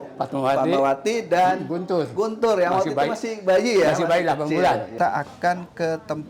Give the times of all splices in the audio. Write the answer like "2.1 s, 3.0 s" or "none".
4.9 s